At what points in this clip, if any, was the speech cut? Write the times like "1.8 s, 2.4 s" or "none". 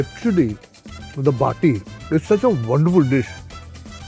1.9 s